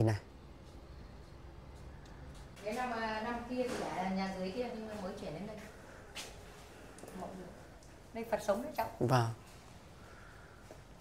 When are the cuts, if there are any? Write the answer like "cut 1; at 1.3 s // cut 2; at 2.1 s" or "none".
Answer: cut 1; at 2.6 s